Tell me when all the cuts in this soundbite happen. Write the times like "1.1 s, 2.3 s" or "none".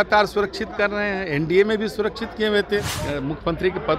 3.0 s